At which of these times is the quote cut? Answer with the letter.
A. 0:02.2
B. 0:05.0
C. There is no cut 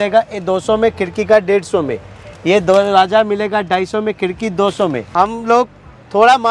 B